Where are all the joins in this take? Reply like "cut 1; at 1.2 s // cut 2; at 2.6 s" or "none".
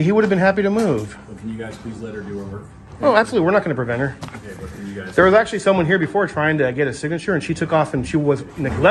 none